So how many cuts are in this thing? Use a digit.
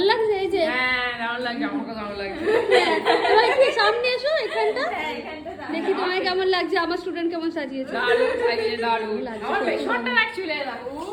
0